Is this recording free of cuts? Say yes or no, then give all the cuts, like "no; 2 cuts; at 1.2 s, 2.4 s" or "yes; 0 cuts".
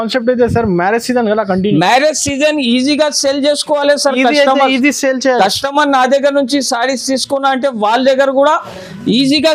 yes; 0 cuts